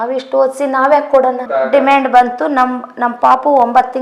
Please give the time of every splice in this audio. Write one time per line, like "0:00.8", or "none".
0:01.4